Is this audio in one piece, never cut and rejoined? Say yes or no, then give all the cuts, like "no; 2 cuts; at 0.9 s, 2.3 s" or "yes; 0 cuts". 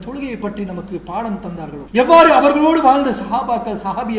no; 1 cut; at 1.8 s